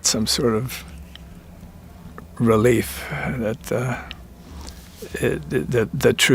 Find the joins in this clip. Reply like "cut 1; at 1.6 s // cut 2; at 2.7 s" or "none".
none